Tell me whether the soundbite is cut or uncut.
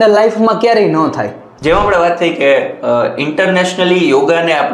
cut